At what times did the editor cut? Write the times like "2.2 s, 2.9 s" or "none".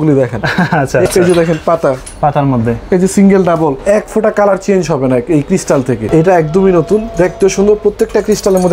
1.1 s, 3.8 s, 6.1 s